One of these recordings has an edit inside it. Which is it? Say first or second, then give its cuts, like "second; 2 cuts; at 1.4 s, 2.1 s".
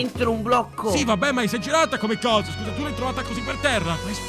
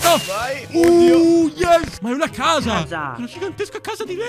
second; 1 cut; at 1.9 s